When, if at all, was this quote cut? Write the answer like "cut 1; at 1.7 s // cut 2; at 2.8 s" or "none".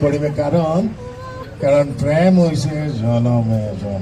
none